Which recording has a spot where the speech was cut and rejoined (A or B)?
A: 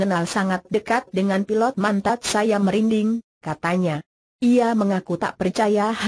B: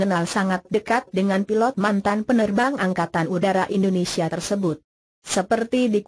B